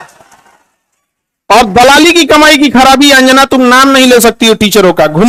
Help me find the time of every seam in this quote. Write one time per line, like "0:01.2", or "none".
none